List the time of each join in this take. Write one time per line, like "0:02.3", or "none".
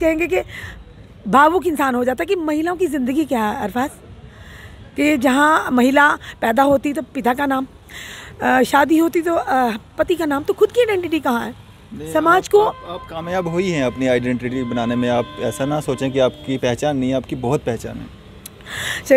none